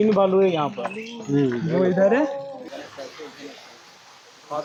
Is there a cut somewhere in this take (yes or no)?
no